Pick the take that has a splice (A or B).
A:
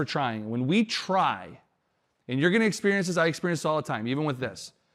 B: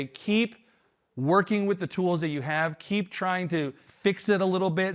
B